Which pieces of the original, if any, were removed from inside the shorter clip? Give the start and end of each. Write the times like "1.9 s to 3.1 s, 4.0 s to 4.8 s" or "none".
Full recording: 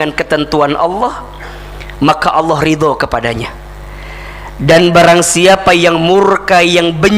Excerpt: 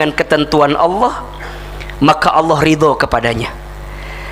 none